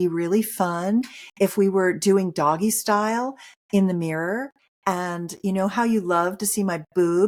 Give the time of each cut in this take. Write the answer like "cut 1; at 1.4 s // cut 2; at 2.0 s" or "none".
none